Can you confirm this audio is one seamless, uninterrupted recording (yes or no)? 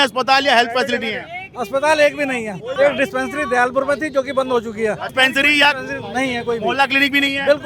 no